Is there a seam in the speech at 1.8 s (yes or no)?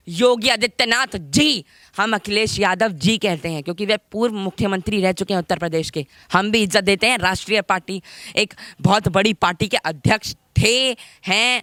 no